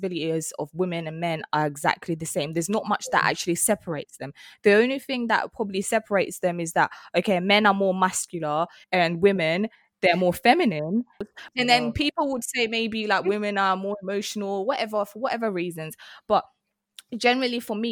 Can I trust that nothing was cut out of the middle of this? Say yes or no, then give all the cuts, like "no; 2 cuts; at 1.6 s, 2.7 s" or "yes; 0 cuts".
no; 2 cuts; at 8.8 s, 11.2 s